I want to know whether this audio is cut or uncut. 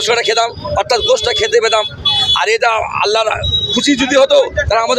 uncut